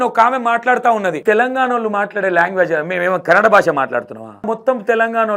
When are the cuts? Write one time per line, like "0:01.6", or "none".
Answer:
0:01.2
0:04.5